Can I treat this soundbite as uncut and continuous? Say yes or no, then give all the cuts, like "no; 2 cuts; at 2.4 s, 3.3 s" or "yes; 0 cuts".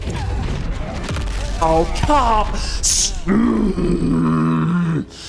yes; 0 cuts